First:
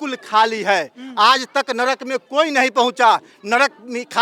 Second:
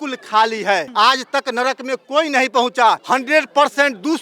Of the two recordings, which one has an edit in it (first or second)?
second